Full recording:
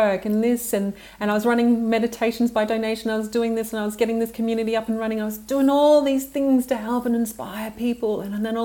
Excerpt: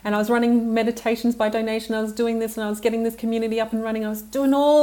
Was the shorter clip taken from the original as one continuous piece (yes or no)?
yes